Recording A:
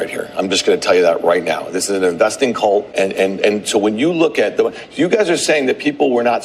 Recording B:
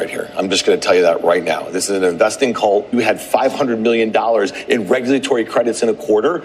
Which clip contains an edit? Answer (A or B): B